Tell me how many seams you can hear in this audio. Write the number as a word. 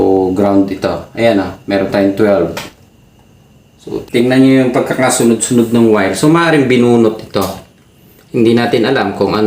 one